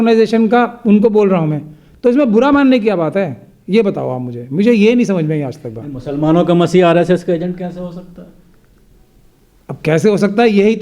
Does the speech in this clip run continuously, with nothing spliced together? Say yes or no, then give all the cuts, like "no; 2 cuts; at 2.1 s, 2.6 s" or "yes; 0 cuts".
yes; 0 cuts